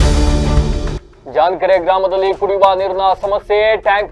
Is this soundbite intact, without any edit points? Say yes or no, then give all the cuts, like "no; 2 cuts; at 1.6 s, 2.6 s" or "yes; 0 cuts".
yes; 0 cuts